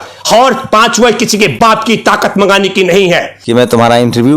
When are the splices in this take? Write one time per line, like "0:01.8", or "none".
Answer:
0:03.3